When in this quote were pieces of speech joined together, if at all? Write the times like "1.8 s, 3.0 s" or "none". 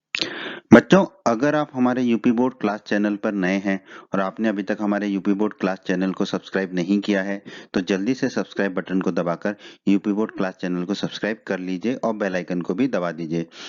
3.6 s